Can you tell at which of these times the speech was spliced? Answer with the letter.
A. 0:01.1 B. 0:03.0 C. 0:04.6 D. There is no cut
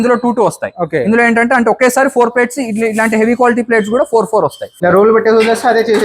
C